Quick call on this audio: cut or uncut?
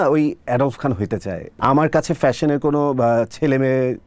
cut